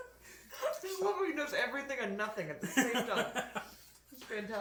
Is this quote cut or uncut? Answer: uncut